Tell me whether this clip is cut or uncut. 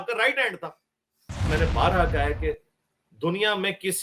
cut